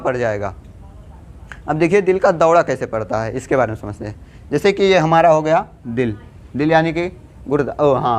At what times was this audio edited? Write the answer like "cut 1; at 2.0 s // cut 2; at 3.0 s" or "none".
none

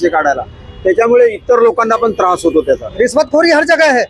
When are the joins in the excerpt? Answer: cut 1; at 2.9 s

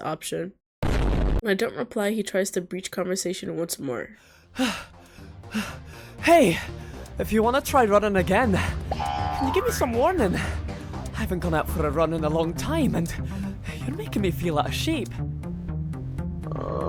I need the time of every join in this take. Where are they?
none

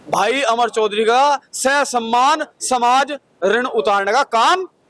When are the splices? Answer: none

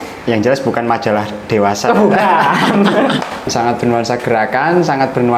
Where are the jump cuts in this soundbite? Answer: cut 1; at 3.4 s

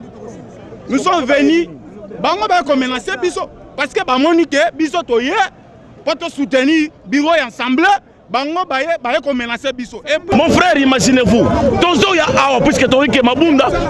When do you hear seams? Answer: cut 1; at 10.3 s

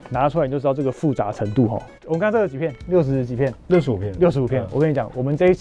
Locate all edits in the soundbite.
cut 1; at 1.9 s

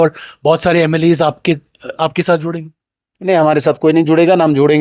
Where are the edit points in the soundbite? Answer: none

